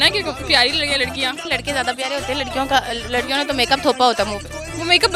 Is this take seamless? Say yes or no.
no